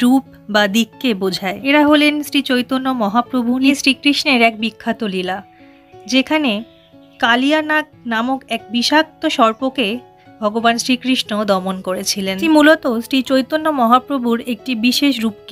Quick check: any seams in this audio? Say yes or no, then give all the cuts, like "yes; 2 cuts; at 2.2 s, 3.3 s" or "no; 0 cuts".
yes; 2 cuts; at 3.8 s, 12.4 s